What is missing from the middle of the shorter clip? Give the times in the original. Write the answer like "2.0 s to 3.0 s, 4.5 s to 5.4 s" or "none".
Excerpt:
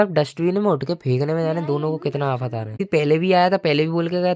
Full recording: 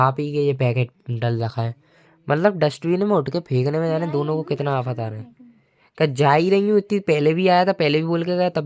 5.3 s to 7.0 s